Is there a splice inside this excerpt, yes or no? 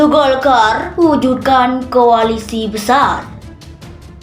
yes